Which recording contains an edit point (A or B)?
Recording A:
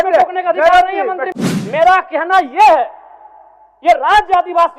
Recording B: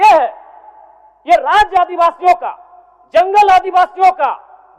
A